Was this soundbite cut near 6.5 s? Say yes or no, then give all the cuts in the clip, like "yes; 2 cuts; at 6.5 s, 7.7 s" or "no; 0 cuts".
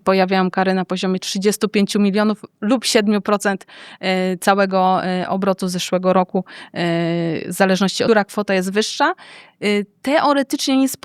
no; 0 cuts